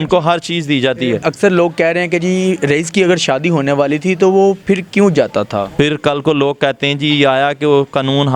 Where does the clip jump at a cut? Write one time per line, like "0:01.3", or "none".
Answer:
0:01.2
0:05.7